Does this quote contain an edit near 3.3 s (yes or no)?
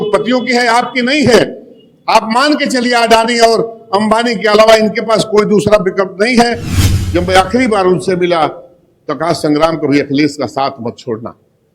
no